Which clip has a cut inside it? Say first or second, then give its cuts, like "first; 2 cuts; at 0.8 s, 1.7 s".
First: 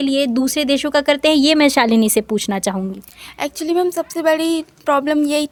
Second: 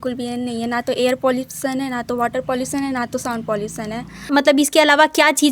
second; 1 cut; at 4.3 s